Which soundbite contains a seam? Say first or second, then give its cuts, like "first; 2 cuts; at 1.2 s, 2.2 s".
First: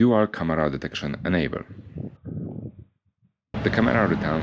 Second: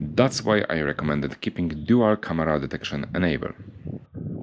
first; 1 cut; at 3.5 s